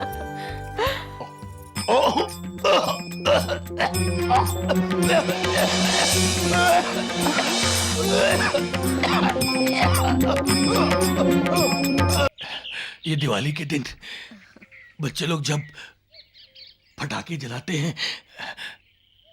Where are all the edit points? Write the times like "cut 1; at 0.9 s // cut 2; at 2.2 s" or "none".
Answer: cut 1; at 12.3 s